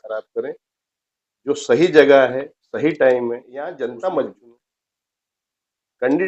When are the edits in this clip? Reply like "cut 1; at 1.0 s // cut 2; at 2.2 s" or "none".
cut 1; at 3.6 s